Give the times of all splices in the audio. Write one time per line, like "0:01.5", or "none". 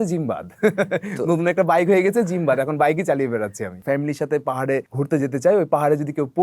0:03.7
0:04.9